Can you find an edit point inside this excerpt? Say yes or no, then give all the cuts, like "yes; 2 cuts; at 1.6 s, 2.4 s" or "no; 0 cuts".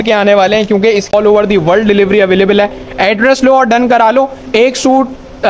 yes; 1 cut; at 1.1 s